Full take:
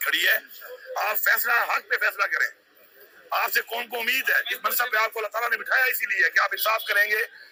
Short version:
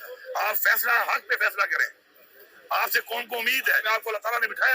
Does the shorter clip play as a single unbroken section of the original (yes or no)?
no